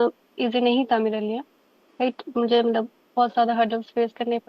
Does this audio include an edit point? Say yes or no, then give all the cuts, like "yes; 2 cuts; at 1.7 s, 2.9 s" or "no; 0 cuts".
no; 0 cuts